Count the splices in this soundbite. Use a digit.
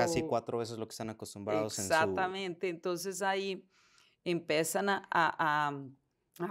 0